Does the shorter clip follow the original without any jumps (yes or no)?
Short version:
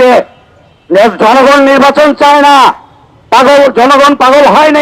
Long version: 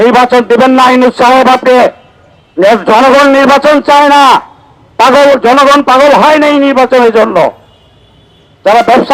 yes